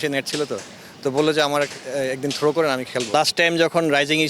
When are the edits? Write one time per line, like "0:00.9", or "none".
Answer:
0:03.1